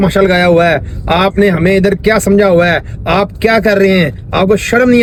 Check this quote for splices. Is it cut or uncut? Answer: uncut